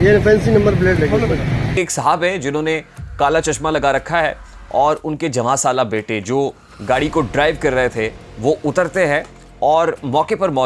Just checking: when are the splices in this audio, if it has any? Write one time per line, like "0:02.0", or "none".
0:01.8

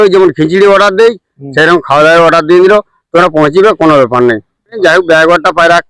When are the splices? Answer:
0:04.8

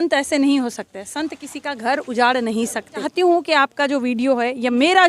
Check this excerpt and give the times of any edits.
0:03.1

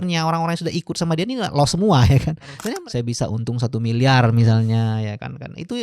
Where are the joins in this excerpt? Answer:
0:02.6

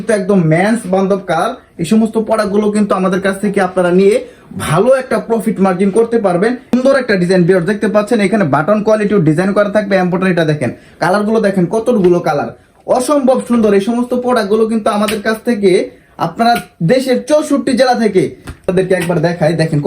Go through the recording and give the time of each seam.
0:06.7
0:18.7

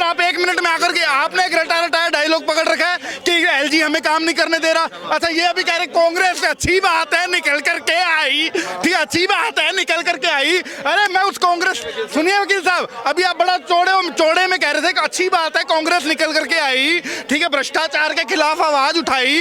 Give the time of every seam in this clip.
none

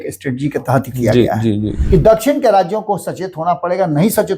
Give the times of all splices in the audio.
0:01.7

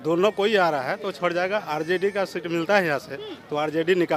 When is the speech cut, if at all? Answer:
none

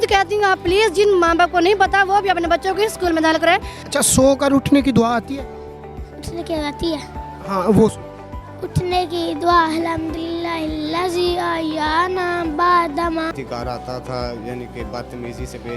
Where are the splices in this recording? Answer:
0:03.8
0:13.3

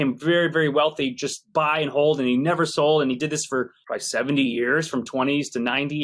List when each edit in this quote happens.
none

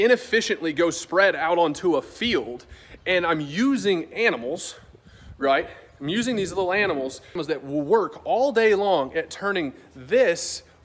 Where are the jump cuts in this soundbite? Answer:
0:07.4

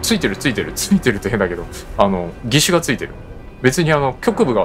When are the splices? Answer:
0:02.4

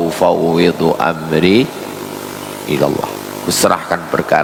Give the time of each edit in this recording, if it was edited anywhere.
none

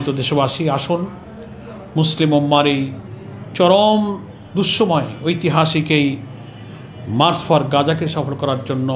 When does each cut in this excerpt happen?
none

